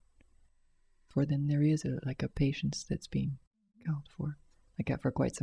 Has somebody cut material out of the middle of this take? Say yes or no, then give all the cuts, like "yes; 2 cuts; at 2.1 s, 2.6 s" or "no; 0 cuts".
yes; 1 cut; at 1.1 s